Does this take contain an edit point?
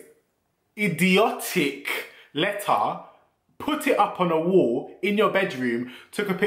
no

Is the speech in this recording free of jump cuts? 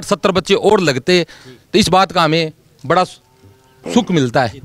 yes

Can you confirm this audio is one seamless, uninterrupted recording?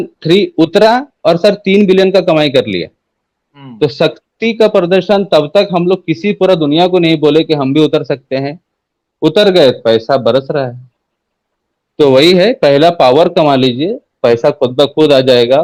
yes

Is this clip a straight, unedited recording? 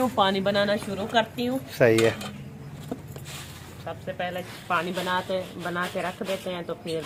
yes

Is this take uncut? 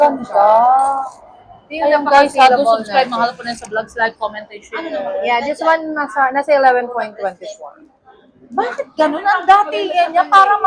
yes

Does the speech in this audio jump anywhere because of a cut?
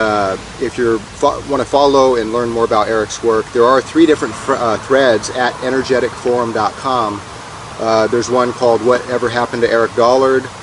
no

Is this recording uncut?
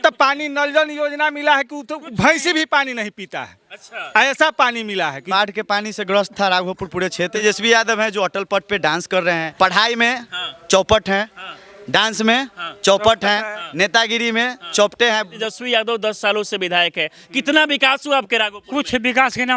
no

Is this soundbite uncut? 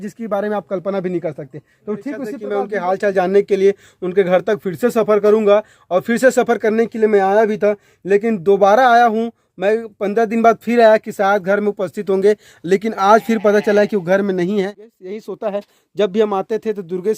no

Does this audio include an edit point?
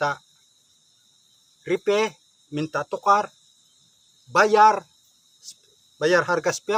no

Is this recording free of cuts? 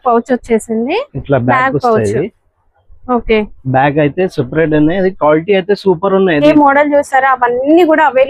no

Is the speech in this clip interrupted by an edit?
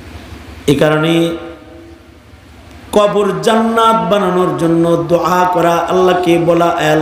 no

